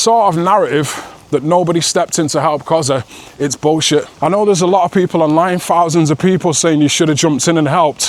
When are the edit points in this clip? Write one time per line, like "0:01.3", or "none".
0:04.1